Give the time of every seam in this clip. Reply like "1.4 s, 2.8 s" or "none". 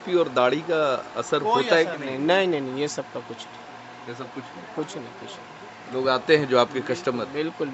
none